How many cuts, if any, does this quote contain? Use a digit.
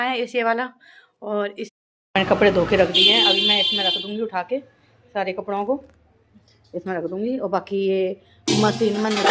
1